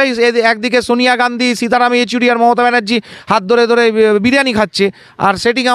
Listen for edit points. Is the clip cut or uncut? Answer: uncut